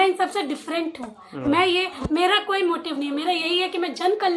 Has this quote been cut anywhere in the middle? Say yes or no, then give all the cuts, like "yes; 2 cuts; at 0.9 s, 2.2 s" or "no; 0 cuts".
no; 0 cuts